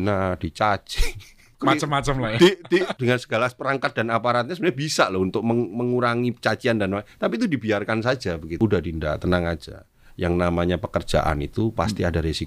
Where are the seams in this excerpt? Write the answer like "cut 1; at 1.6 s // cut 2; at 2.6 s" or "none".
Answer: cut 1; at 1.5 s // cut 2; at 2.9 s // cut 3; at 8.6 s

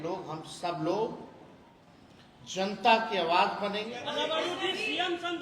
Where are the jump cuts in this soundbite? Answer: cut 1; at 3.9 s

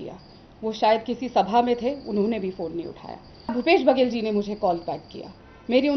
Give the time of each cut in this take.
cut 1; at 3.5 s

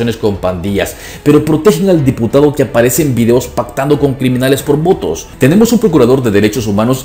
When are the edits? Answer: cut 1; at 5.3 s

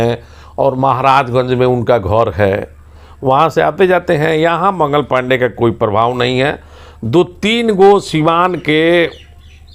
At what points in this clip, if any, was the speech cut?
none

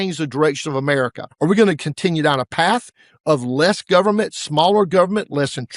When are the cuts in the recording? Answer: cut 1; at 1.2 s

